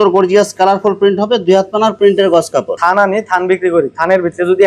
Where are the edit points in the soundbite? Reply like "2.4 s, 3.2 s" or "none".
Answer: 2.7 s